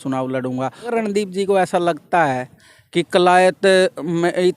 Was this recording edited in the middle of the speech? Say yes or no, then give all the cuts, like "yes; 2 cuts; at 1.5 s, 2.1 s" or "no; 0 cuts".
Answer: yes; 1 cut; at 0.9 s